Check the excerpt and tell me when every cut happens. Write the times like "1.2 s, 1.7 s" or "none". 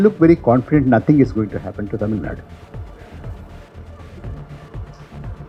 none